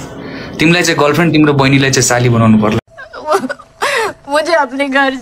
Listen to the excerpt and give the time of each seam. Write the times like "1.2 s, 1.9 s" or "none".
2.8 s